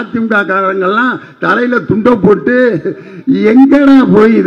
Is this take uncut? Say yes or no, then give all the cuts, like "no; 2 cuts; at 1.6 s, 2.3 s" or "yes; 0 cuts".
yes; 0 cuts